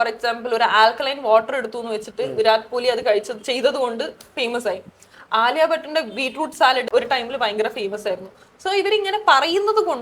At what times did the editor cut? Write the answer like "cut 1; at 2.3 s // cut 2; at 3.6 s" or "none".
cut 1; at 6.9 s